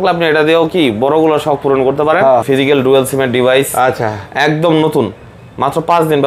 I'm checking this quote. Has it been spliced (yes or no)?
yes